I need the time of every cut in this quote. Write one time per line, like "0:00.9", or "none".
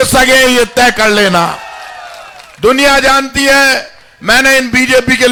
none